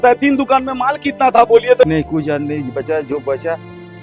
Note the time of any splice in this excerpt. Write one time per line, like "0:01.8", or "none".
0:01.8